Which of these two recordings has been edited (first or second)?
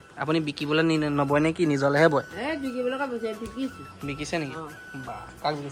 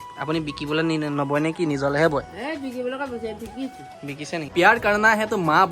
second